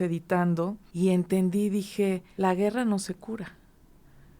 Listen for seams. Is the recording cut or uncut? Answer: cut